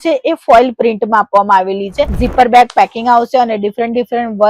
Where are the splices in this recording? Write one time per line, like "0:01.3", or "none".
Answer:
0:02.2